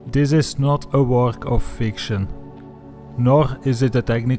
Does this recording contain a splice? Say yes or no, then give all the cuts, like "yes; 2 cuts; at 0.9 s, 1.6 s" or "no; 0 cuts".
yes; 1 cut; at 1.4 s